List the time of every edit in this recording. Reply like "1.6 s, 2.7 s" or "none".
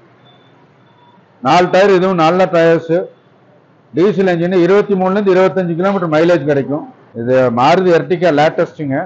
7.1 s